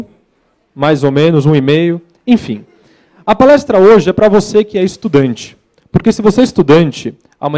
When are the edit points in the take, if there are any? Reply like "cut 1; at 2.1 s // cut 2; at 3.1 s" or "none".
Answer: none